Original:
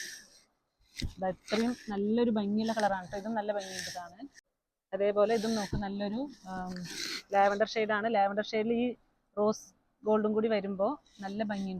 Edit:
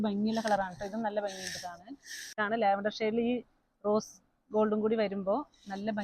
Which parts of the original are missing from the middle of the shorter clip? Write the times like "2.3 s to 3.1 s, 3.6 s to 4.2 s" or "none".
4.7 s to 7.9 s